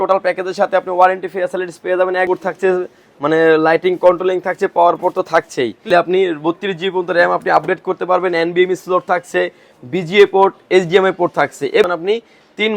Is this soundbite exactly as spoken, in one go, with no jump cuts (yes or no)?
no